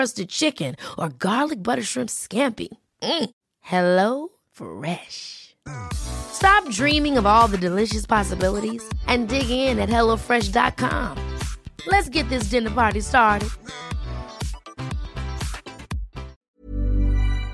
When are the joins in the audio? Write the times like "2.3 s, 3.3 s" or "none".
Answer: 16.4 s